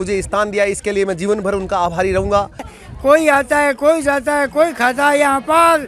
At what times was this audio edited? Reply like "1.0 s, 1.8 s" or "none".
2.7 s